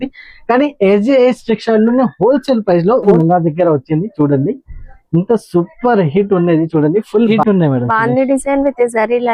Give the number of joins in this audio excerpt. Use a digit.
2